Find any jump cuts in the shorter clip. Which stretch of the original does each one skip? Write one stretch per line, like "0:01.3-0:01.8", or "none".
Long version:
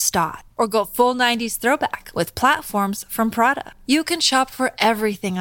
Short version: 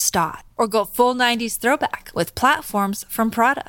none